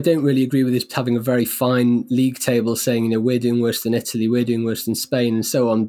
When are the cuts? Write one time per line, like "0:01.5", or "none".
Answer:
0:00.9